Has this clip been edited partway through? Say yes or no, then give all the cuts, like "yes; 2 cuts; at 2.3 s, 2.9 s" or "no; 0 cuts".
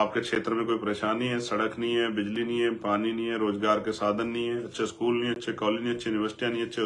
no; 0 cuts